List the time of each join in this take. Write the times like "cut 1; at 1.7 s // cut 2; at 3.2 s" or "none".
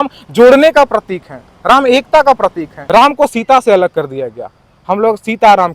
cut 1; at 2.7 s